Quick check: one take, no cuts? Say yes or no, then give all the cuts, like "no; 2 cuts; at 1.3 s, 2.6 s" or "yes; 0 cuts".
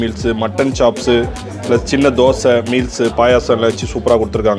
yes; 0 cuts